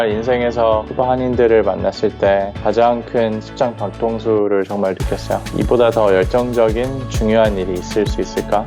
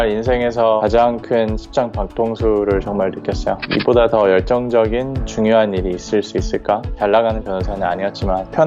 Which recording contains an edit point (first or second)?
second